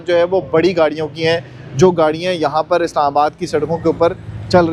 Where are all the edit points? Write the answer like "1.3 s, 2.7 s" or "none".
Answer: none